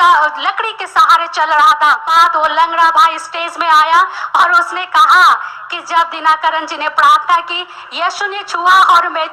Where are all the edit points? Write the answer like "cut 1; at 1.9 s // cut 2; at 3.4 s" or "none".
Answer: cut 1; at 2.0 s